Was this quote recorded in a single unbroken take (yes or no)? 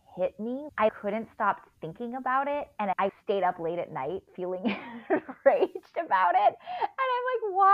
no